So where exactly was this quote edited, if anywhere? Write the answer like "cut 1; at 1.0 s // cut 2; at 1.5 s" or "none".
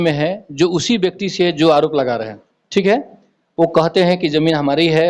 none